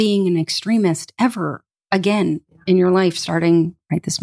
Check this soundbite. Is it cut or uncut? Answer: uncut